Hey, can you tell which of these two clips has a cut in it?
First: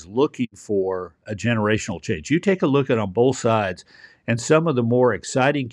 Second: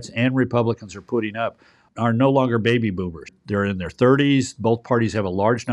second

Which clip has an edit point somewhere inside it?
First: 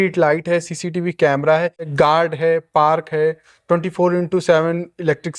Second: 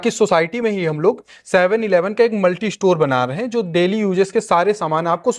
first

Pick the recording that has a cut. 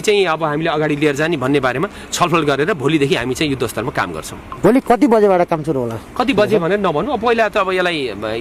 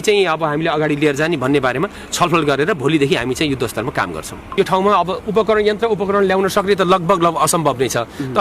second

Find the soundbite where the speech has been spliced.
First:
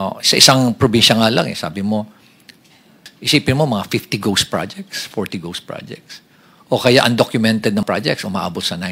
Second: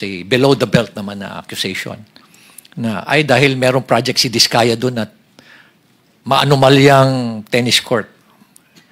first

